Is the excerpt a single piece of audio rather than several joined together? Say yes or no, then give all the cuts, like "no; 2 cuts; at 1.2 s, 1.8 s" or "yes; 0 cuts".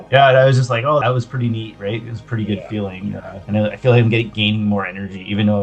no; 2 cuts; at 1.0 s, 3.4 s